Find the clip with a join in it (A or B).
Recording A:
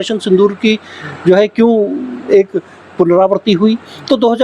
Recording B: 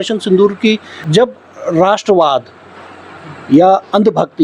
B